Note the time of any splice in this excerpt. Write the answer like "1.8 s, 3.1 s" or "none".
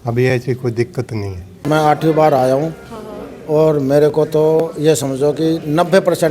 1.6 s